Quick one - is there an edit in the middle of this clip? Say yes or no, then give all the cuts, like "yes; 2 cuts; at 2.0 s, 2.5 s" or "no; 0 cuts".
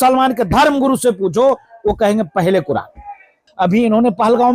yes; 1 cut; at 3.4 s